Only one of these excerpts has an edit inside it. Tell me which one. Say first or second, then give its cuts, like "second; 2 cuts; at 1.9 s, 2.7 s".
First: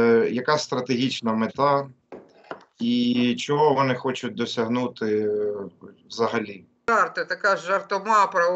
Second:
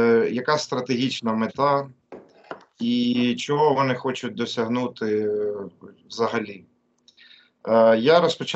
first; 1 cut; at 6.8 s